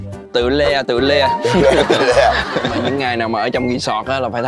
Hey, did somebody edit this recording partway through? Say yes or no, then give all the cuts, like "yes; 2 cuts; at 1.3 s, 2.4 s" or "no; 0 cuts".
yes; 1 cut; at 2.8 s